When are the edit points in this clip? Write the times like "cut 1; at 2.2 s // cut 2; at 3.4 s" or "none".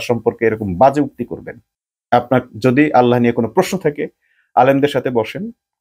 none